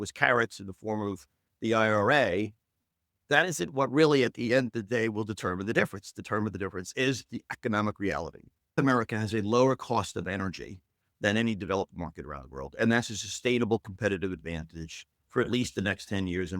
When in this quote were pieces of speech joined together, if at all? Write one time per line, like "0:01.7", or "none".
0:08.8